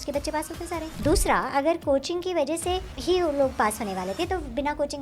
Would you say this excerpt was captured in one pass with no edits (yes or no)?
no